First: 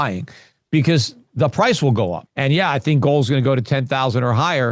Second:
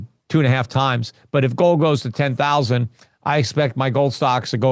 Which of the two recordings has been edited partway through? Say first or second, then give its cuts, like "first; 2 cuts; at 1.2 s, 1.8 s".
first; 1 cut; at 2.3 s